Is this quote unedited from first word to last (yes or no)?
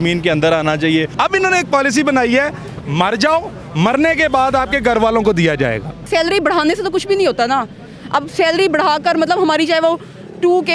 no